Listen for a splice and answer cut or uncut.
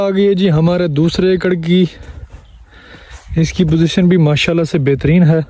uncut